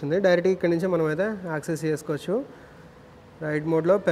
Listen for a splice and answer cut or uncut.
uncut